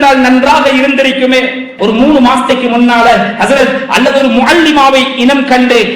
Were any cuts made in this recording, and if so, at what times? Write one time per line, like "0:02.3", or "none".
0:01.7